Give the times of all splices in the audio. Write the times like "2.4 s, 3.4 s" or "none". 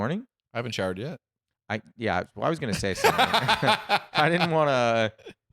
none